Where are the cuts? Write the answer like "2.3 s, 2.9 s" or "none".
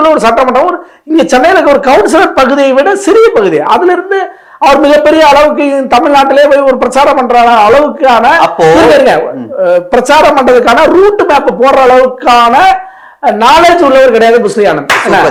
none